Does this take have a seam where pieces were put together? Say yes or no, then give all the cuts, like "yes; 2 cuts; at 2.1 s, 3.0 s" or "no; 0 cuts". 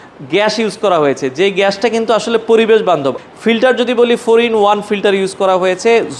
yes; 1 cut; at 3.2 s